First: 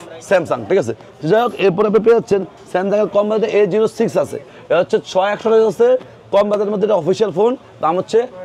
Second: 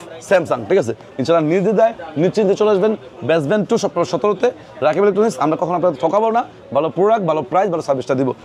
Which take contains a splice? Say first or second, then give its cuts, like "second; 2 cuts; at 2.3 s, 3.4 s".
second; 1 cut; at 1.1 s